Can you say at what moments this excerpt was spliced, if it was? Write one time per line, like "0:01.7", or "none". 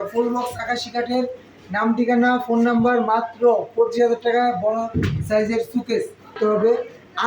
0:06.4